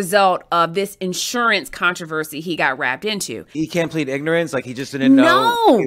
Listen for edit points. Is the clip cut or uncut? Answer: cut